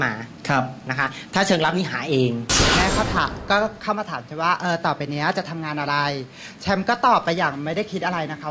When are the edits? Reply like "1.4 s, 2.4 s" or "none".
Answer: 2.5 s